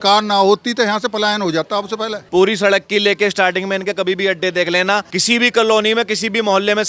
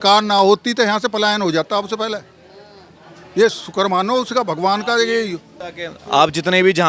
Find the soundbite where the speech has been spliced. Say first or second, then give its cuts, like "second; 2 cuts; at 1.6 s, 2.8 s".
first; 2 cuts; at 2.1 s, 5.1 s